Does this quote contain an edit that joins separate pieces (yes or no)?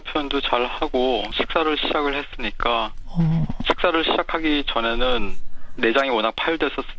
no